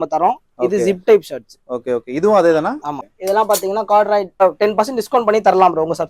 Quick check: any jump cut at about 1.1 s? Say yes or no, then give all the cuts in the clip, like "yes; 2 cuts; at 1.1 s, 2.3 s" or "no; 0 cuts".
no; 2 cuts; at 2.9 s, 4.4 s